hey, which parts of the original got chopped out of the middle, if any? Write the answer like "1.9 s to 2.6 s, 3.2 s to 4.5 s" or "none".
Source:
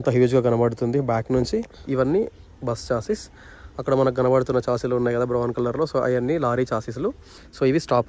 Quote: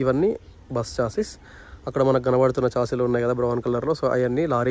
none